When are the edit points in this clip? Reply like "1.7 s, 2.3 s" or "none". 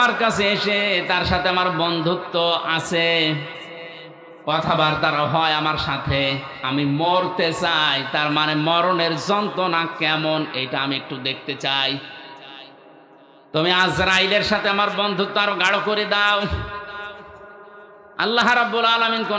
none